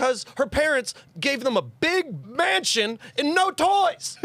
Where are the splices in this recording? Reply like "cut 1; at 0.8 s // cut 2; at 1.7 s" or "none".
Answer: cut 1; at 2.2 s